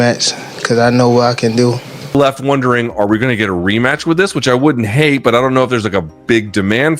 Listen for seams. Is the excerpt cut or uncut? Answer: cut